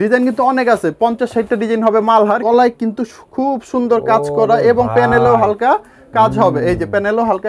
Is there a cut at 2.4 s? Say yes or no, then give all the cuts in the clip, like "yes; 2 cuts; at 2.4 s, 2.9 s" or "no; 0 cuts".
yes; 1 cut; at 2.4 s